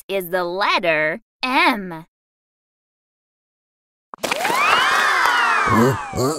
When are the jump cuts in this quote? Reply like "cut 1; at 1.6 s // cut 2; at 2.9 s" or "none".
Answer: cut 1; at 1.2 s